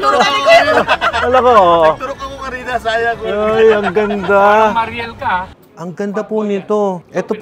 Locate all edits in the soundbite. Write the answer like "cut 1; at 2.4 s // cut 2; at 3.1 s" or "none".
cut 1; at 5.5 s